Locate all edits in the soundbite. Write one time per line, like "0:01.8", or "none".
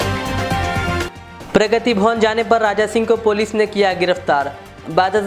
0:01.0